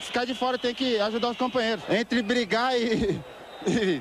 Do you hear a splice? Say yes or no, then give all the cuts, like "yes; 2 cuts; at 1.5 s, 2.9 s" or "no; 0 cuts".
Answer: yes; 1 cut; at 1.8 s